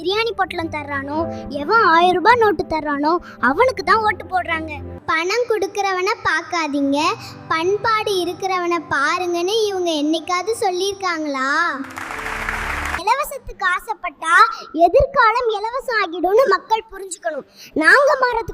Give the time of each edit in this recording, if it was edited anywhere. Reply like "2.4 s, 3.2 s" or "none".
4.8 s, 12.8 s